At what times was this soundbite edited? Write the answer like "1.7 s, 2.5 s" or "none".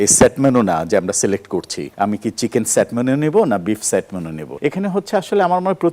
1.8 s, 4.4 s